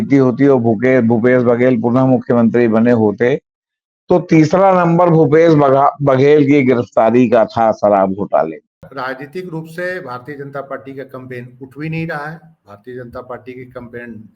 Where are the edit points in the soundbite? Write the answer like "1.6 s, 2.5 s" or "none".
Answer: 8.9 s